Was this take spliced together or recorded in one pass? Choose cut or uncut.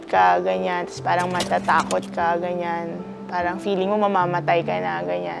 uncut